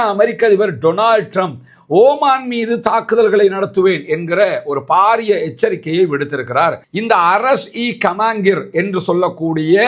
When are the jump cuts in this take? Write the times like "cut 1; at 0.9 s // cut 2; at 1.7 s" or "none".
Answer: cut 1; at 6.9 s

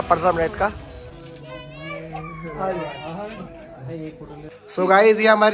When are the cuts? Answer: cut 1; at 1.2 s // cut 2; at 4.6 s

